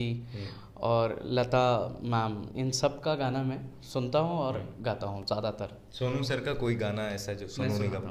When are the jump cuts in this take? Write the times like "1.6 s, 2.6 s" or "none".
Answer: none